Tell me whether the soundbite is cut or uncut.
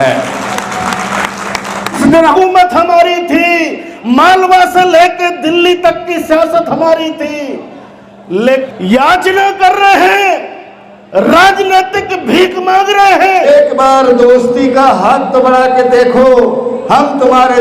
cut